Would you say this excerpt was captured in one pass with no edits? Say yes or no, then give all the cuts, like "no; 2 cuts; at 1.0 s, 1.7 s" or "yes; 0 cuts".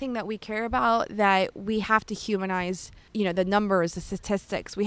no; 1 cut; at 2.9 s